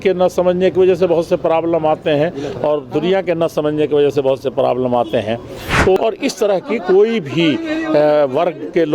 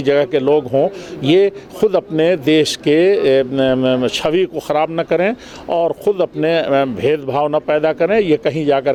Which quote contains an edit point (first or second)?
first